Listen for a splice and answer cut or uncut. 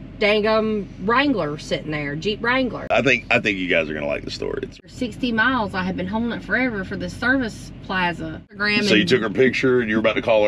cut